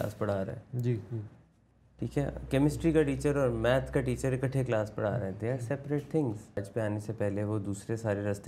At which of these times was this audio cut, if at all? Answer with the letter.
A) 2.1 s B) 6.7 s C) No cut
B